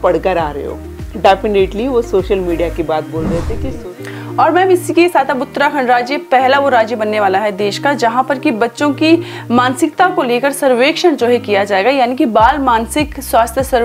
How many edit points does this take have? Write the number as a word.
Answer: one